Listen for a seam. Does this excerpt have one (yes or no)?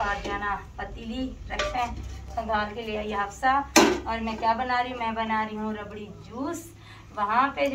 no